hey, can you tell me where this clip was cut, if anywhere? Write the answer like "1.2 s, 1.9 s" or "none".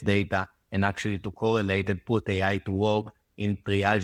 none